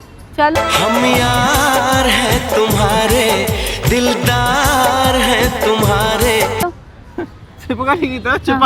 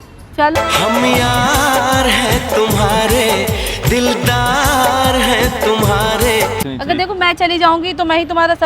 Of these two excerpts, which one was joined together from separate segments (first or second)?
second